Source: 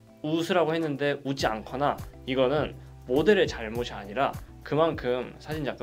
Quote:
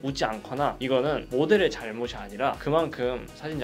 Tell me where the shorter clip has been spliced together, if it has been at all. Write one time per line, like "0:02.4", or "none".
0:01.0
0:02.6